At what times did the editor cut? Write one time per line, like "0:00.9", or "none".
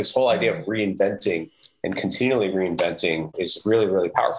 none